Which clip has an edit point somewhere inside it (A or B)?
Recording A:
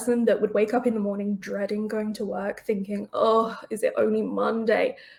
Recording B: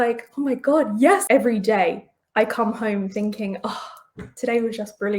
B